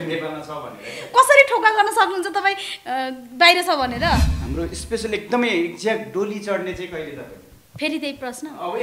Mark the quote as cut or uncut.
cut